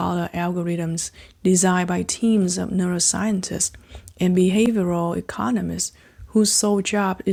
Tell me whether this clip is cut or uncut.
uncut